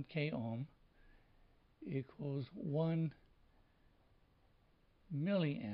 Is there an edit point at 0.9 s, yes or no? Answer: yes